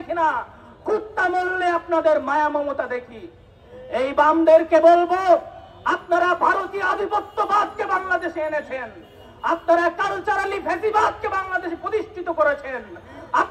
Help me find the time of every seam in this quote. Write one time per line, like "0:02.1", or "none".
none